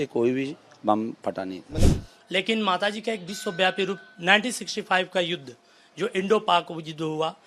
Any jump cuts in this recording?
yes; 1 cut; at 1.9 s

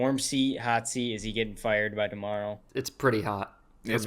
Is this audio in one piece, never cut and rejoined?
no; 1 cut; at 2.6 s

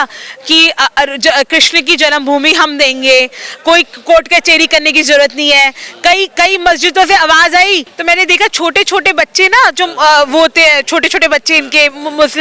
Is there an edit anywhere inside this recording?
yes; 1 cut; at 7.9 s

